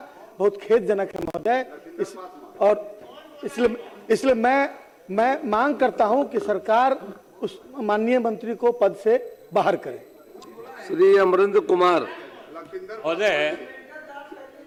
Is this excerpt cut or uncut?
uncut